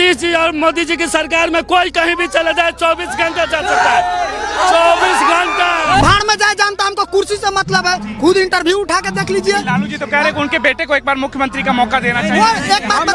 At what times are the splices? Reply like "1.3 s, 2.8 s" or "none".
6.0 s